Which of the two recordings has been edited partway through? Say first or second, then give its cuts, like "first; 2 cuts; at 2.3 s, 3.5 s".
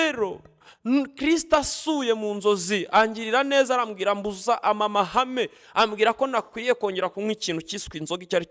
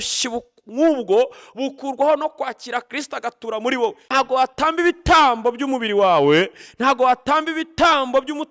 second; 1 cut; at 4.0 s